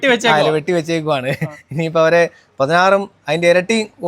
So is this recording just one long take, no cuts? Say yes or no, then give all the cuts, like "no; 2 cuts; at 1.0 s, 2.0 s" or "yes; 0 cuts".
yes; 0 cuts